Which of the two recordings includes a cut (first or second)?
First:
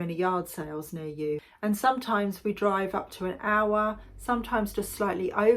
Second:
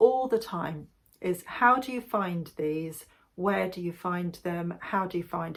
first